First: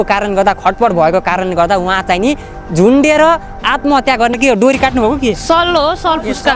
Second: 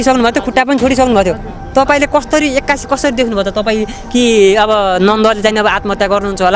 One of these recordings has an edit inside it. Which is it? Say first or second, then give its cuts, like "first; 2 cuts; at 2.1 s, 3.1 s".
first; 1 cut; at 4.4 s